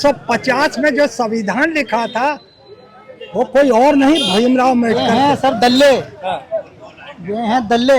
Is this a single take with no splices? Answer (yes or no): no